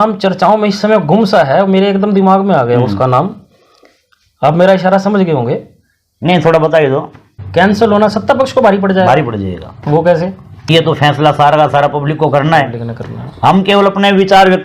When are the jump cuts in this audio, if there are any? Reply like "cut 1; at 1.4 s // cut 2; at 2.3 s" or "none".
cut 1; at 7.2 s // cut 2; at 10.7 s